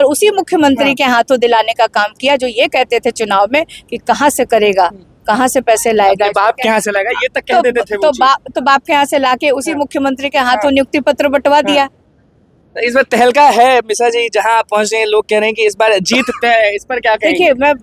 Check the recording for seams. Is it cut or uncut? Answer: uncut